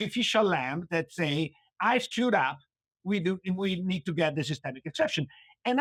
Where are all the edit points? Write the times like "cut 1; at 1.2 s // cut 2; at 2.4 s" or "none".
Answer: none